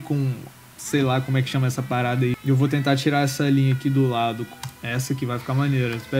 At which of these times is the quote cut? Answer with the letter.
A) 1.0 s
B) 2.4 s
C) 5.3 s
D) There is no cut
B